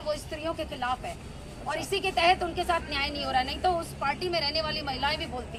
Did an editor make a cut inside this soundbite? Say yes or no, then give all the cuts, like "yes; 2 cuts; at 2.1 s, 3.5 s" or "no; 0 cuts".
no; 0 cuts